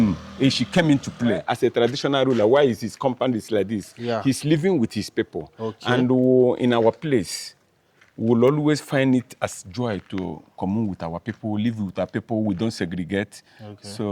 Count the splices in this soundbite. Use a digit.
1